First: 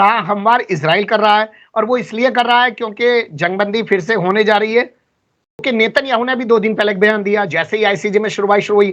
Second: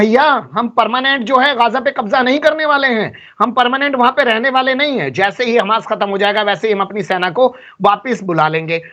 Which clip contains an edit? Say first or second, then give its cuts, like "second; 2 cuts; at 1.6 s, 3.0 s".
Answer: first; 1 cut; at 5.6 s